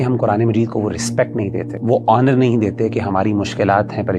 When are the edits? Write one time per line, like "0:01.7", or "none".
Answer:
0:01.7